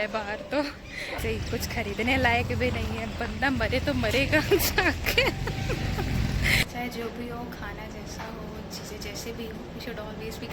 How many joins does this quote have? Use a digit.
2